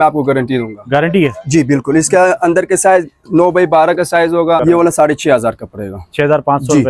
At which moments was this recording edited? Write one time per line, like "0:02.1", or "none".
0:04.6